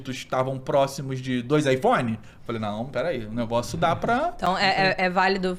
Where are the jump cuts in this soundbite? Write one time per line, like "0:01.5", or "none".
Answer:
none